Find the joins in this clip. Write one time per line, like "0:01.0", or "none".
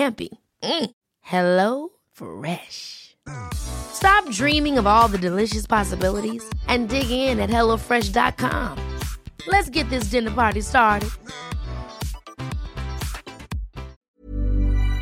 0:14.1